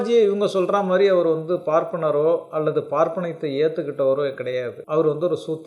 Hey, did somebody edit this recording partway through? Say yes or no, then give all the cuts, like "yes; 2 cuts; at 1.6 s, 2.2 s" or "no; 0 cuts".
yes; 1 cut; at 4.8 s